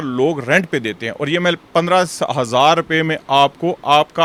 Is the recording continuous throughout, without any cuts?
yes; 0 cuts

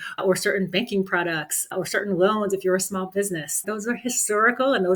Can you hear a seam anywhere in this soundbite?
yes; 1 cut; at 3.6 s

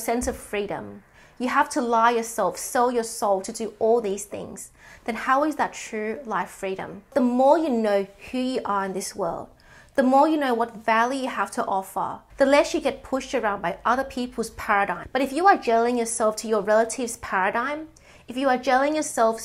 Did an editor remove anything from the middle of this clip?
yes; 2 cuts; at 7.1 s, 15.0 s

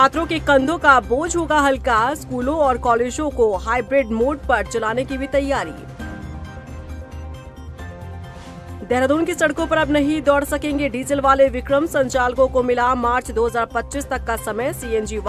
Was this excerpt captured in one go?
yes; 0 cuts

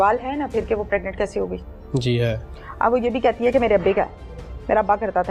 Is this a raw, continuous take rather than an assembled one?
yes; 0 cuts

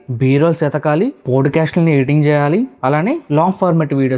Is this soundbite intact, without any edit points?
yes; 0 cuts

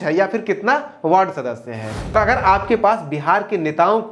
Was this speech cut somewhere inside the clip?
yes; 1 cut; at 2.1 s

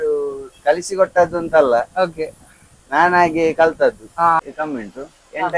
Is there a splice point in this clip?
yes; 1 cut; at 4.4 s

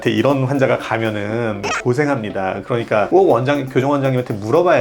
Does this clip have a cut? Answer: no; 0 cuts

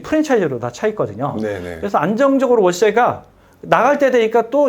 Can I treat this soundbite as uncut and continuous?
yes; 0 cuts

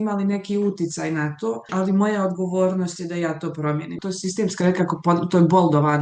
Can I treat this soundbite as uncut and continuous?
no; 2 cuts; at 1.7 s, 4.0 s

